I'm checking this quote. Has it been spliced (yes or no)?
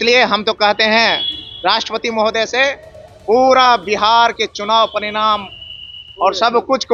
no